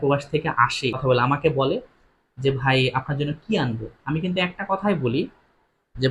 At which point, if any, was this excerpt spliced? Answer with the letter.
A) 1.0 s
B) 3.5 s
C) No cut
A